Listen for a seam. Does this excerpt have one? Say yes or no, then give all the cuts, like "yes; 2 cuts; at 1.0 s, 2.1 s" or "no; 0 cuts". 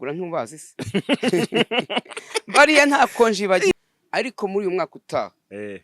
yes; 1 cut; at 3.7 s